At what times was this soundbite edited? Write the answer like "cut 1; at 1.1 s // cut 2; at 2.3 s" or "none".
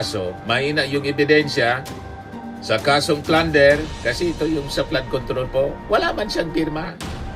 none

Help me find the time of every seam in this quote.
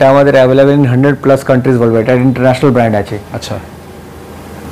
none

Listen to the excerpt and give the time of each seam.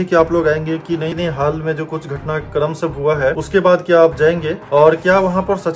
cut 1; at 1.1 s

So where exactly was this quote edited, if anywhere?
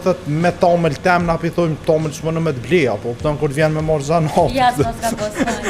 none

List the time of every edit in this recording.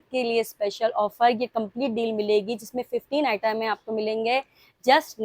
none

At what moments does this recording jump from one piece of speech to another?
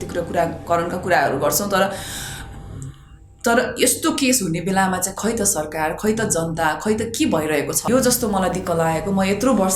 cut 1; at 7.9 s

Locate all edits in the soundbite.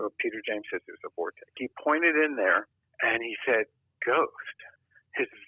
cut 1; at 1.6 s

